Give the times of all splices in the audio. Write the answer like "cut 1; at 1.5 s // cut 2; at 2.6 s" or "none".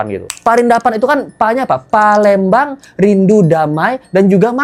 none